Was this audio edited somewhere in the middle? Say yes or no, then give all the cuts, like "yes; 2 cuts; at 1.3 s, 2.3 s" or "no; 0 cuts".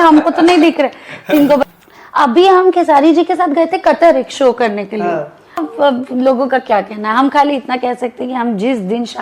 yes; 2 cuts; at 1.6 s, 5.7 s